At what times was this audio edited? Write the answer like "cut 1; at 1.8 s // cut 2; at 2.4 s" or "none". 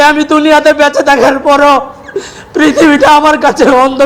none